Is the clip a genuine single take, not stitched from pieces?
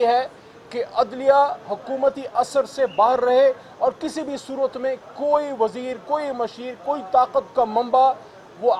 yes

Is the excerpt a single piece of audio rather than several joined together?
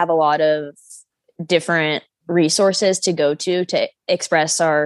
no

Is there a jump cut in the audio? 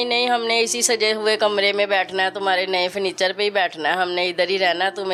no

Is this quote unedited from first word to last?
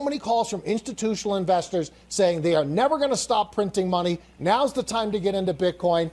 yes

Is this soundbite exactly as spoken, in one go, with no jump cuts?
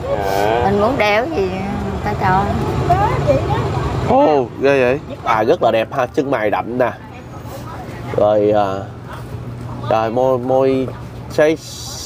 no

